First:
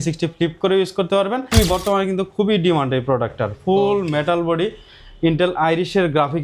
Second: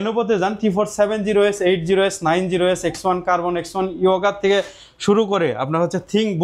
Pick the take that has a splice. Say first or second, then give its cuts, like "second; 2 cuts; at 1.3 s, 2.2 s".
first; 1 cut; at 1.5 s